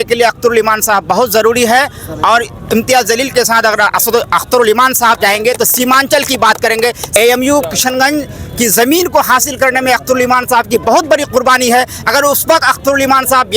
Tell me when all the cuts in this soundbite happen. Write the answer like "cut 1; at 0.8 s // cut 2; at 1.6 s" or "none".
cut 1; at 7.0 s